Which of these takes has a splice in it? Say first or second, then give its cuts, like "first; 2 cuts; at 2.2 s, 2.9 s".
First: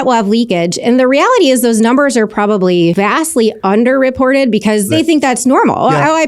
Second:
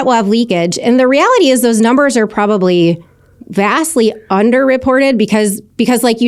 first; 2 cuts; at 3.5 s, 4.9 s